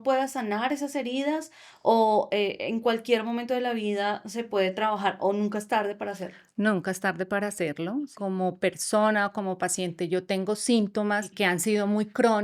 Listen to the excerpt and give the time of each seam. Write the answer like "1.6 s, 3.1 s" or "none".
8.1 s, 11.3 s